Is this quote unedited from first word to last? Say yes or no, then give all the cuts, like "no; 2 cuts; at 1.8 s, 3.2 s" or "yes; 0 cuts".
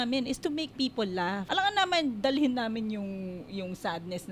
no; 1 cut; at 1.4 s